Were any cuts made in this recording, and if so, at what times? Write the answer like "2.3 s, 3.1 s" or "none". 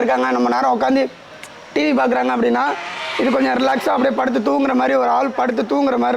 none